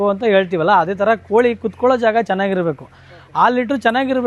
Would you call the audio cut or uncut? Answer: uncut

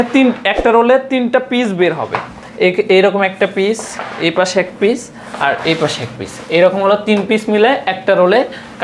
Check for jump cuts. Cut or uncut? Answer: uncut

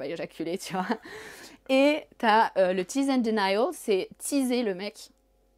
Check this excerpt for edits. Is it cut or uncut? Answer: uncut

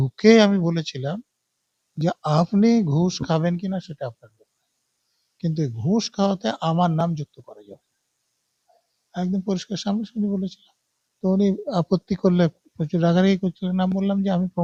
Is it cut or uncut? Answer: uncut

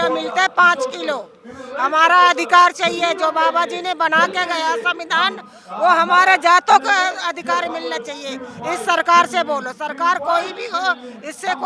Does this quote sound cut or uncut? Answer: uncut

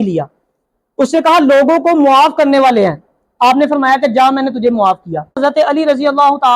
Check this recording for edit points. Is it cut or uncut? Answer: cut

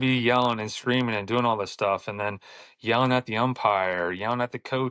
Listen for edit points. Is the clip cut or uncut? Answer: uncut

